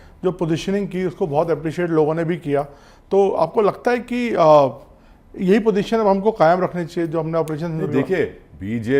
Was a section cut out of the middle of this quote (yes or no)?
no